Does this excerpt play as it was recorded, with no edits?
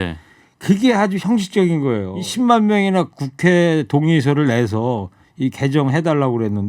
no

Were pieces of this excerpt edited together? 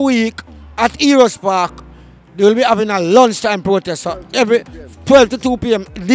no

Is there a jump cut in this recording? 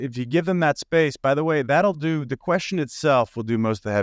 no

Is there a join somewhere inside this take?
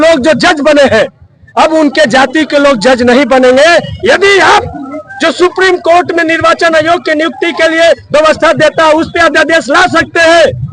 yes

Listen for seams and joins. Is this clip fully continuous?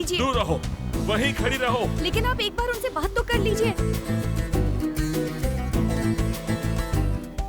yes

